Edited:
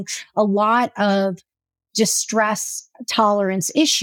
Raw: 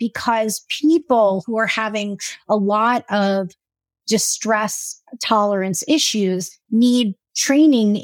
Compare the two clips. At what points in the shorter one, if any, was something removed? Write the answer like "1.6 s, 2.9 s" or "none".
none